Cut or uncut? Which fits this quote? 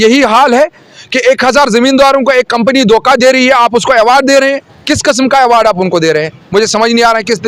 uncut